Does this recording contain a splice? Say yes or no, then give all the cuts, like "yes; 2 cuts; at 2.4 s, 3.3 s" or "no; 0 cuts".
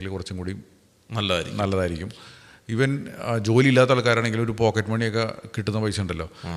no; 0 cuts